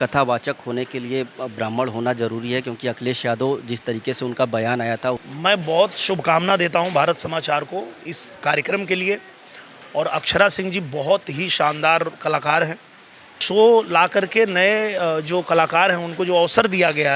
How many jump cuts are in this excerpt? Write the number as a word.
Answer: two